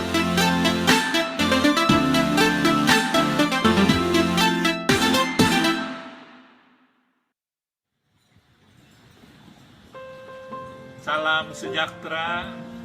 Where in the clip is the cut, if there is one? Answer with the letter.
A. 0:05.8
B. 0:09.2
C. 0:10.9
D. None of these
B